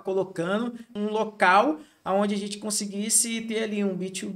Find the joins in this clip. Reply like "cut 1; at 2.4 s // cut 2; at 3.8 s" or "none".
cut 1; at 0.9 s